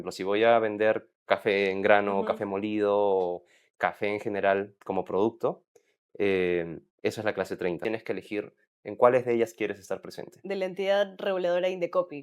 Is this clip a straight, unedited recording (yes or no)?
no